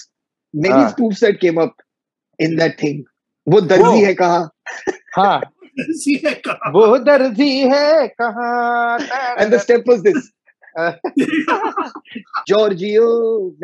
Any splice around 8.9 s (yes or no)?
no